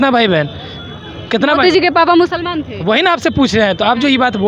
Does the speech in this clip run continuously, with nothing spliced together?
yes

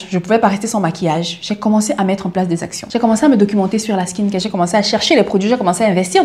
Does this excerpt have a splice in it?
yes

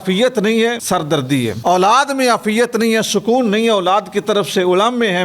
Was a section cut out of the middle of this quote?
yes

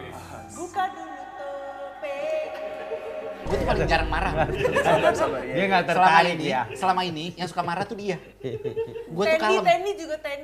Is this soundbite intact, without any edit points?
no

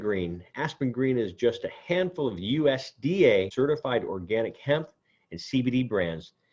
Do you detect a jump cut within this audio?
yes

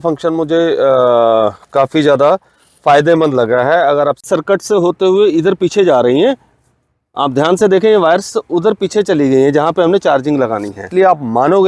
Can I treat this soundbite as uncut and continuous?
no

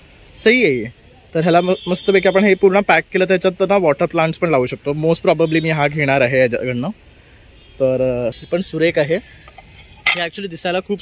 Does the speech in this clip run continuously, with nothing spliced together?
no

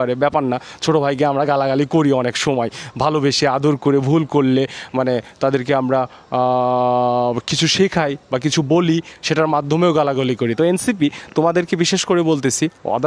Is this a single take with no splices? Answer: yes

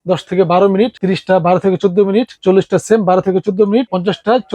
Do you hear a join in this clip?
yes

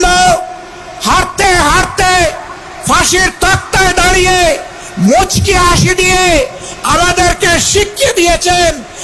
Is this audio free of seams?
yes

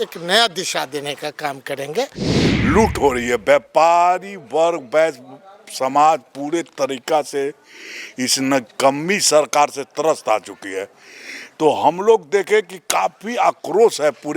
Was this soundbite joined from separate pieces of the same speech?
yes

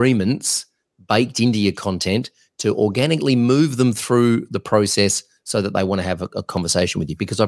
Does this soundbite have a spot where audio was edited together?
no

